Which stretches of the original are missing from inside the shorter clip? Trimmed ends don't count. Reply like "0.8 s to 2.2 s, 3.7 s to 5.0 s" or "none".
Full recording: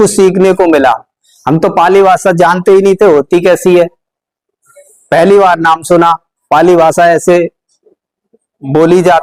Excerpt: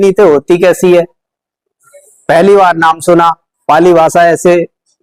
none